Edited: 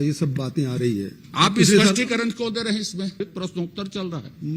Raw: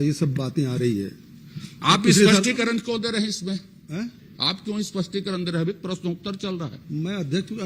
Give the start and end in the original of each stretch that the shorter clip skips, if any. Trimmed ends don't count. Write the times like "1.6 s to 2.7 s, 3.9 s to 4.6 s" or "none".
1.2 s to 1.7 s, 3.7 s to 5.7 s